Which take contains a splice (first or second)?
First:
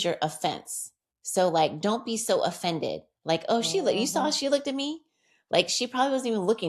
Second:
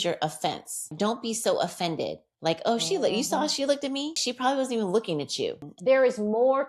second